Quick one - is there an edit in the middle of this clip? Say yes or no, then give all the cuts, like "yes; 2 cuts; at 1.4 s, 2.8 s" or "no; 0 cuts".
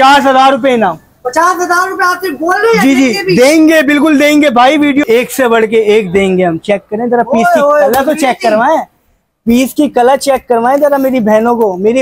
yes; 1 cut; at 5.0 s